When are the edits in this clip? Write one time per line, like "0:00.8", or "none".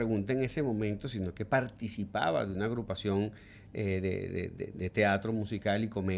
none